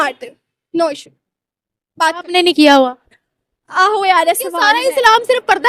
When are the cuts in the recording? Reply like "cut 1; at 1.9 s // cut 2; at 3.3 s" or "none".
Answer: cut 1; at 4.6 s